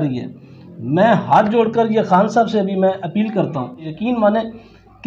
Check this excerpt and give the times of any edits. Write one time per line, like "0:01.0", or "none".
0:03.9